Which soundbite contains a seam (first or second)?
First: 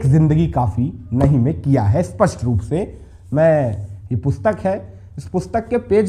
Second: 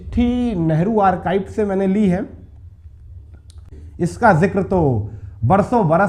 second